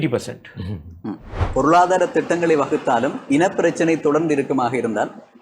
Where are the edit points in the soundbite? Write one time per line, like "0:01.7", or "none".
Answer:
0:01.4

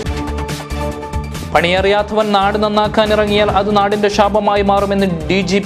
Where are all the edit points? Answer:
0:01.2

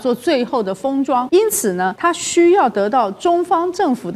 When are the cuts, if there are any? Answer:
0:01.7

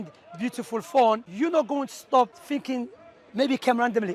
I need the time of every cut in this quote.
0:01.3
0:02.4

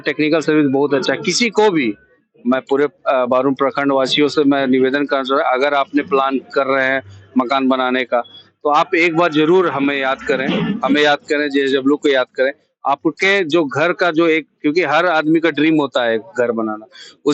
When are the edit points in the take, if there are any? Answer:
none

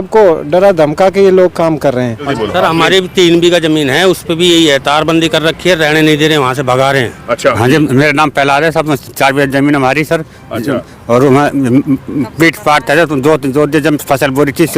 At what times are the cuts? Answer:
0:02.3
0:07.6

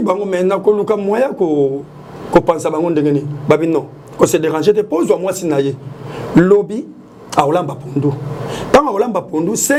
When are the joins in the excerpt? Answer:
none

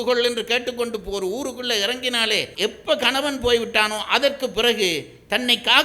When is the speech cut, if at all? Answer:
0:02.5

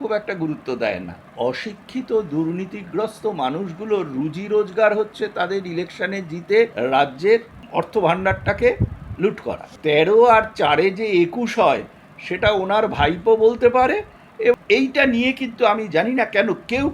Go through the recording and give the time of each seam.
0:01.2
0:06.7
0:07.6
0:09.7
0:14.5

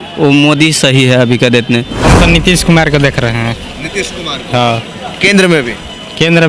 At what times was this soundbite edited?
0:02.1

